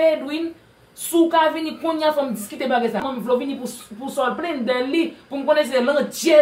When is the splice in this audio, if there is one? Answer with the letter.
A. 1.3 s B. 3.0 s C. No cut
B